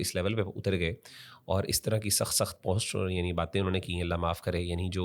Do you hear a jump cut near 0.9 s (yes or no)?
no